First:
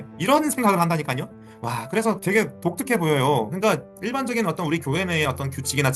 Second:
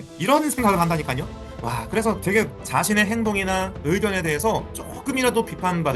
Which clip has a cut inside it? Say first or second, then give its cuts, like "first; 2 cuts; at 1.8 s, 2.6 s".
second; 1 cut; at 2.5 s